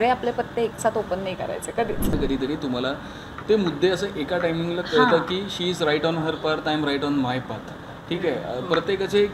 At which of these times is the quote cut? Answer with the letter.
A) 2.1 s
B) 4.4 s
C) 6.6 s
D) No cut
A